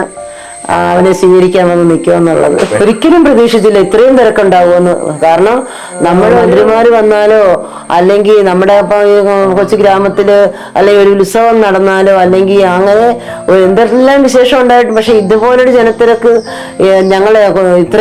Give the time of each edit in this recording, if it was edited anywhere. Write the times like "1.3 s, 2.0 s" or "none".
2.7 s, 6.4 s

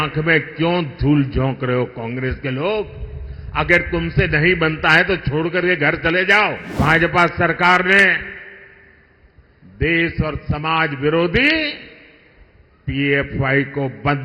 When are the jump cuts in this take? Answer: 6.7 s

